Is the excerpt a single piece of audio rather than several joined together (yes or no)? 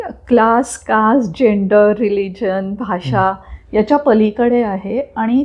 yes